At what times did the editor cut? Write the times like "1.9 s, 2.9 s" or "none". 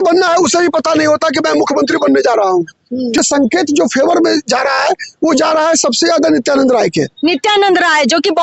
3.2 s